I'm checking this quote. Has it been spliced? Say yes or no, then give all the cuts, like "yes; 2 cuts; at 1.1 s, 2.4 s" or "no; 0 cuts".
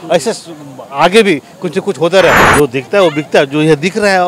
yes; 1 cut; at 2.5 s